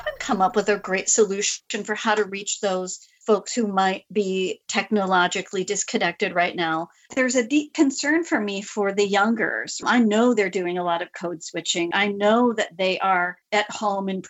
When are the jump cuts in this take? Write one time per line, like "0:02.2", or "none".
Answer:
0:07.1
0:11.9